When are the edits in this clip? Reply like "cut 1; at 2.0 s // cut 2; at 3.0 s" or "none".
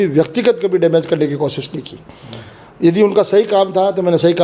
none